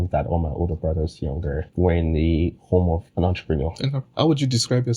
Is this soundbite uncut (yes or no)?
no